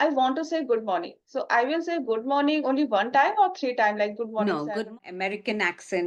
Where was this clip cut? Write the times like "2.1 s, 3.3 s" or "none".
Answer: 4.9 s